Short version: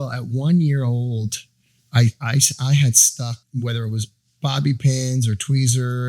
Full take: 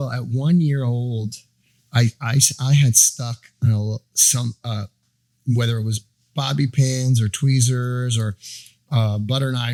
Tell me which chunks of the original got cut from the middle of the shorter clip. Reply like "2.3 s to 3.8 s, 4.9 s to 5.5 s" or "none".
3.4 s to 5.3 s